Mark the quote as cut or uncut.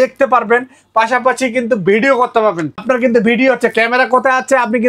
cut